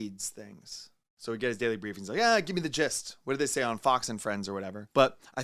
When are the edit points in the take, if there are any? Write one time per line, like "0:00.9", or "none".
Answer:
none